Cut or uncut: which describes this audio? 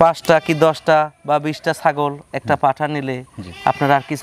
uncut